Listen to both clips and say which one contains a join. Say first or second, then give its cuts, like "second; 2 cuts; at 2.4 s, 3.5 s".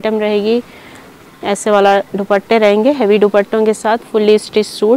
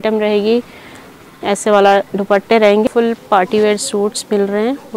second; 1 cut; at 2.8 s